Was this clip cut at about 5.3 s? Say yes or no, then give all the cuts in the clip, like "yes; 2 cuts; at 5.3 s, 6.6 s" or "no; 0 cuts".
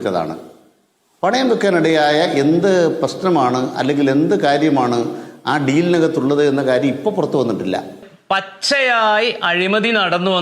no; 1 cut; at 8.1 s